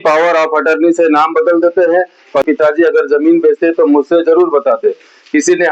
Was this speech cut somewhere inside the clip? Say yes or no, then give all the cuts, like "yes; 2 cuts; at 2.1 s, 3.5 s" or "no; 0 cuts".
yes; 1 cut; at 2.4 s